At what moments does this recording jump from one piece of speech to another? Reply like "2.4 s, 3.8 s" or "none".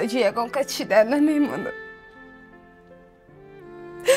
none